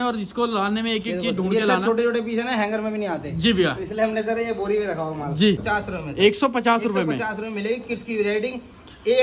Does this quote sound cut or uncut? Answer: cut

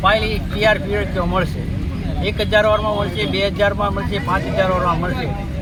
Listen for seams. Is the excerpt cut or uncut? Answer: uncut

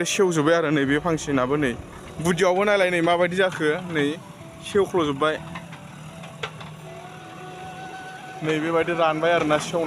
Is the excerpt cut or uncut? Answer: uncut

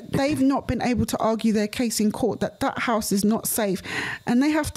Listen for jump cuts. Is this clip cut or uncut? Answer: uncut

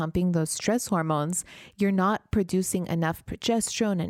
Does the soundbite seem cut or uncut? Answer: uncut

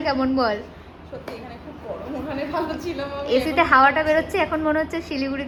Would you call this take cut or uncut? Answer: uncut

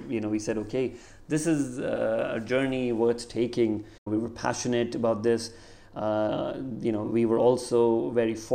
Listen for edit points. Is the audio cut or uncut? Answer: cut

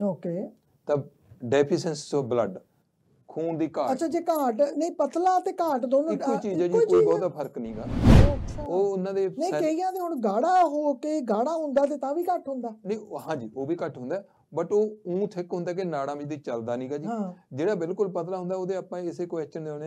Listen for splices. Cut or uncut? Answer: uncut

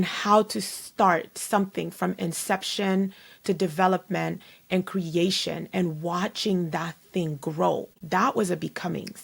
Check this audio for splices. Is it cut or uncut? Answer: cut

